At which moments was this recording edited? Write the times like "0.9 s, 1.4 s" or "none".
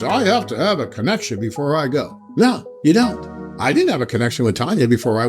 2.2 s